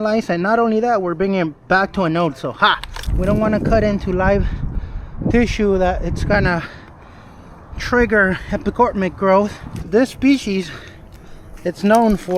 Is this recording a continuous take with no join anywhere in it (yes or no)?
no